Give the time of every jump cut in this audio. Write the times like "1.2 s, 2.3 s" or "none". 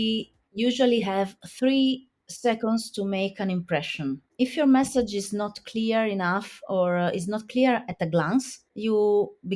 4.3 s

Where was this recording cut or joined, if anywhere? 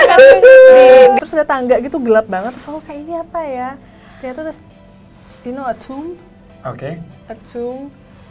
1.2 s

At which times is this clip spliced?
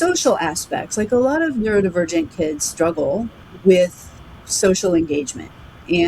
3.4 s

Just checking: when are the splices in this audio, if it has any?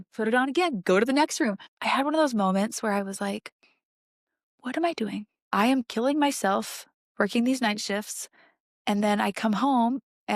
1.7 s, 5.3 s

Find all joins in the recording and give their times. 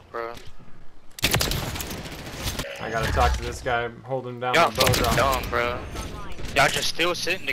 2.6 s

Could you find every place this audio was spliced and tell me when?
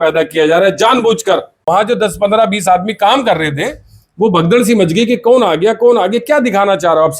1.5 s

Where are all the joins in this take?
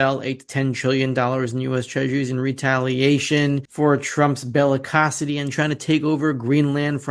none

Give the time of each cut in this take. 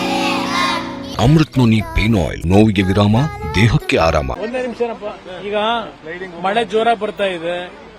1.0 s, 2.4 s, 4.3 s

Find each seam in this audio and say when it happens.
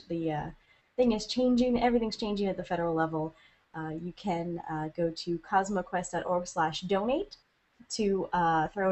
none

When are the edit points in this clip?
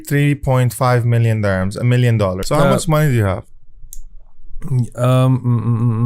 2.4 s

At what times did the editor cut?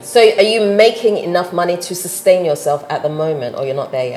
none

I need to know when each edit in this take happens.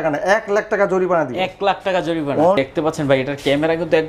2.6 s

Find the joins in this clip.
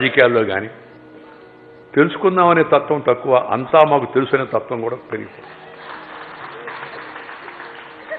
none

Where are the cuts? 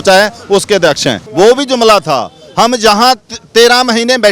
1.2 s

